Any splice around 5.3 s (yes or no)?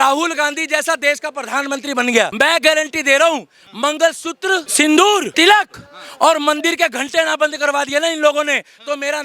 yes